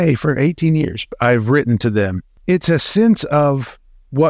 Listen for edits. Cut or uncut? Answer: cut